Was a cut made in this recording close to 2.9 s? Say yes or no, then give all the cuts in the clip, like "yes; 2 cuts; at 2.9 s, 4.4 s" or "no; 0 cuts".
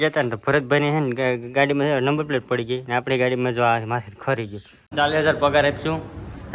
no; 1 cut; at 4.9 s